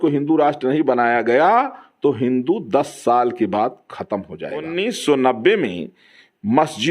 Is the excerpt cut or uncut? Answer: cut